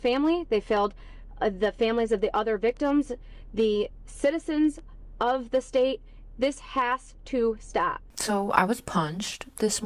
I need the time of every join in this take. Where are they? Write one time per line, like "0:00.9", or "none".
0:08.0